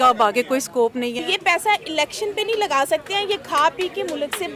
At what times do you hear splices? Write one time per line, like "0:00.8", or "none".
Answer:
0:01.2